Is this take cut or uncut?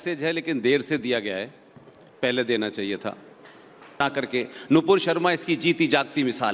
cut